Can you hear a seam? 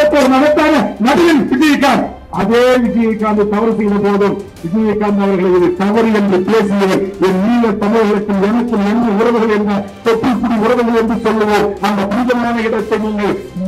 no; 0 cuts

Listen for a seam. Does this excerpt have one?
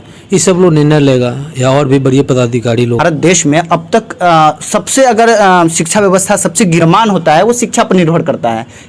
yes; 2 cuts; at 3.0 s, 6.8 s

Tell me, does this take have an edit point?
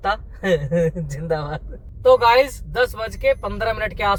no; 0 cuts

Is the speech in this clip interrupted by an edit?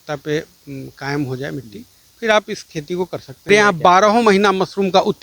yes; 1 cut; at 3.5 s

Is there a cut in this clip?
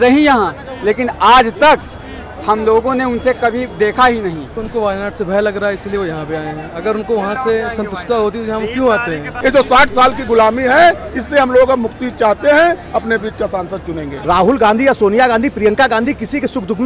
yes; 3 cuts; at 4.5 s, 9.3 s, 14.3 s

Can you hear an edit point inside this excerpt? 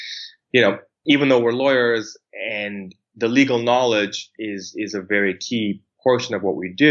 yes; 1 cut; at 0.9 s

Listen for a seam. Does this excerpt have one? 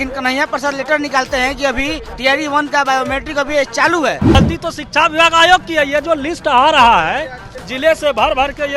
yes; 1 cut; at 4.4 s

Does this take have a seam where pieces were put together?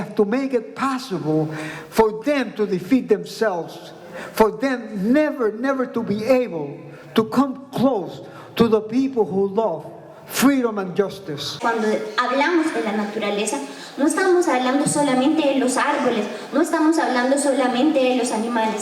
yes; 1 cut; at 11.6 s

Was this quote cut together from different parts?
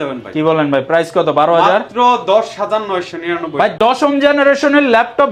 no; 0 cuts

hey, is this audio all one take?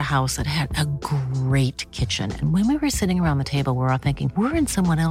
yes; 0 cuts

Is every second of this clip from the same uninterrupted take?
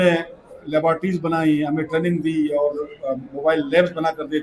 no; 1 cut; at 2.4 s

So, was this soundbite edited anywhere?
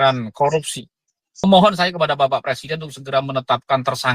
yes; 1 cut; at 1.4 s

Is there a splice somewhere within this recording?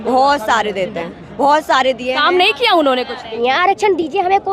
yes; 1 cut; at 3.3 s

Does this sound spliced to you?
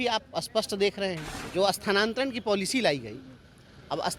yes; 1 cut; at 1.3 s

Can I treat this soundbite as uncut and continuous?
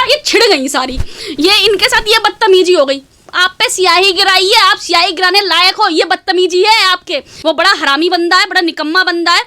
no; 1 cut; at 7.4 s

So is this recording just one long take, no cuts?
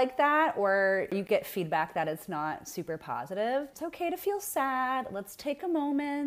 no; 2 cuts; at 1.2 s, 3.9 s

